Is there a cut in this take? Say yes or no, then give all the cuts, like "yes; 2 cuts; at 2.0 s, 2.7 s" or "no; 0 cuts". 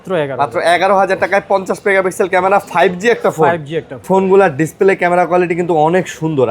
yes; 1 cut; at 4.0 s